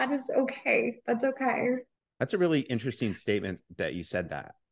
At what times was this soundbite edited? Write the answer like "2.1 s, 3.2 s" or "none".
2.0 s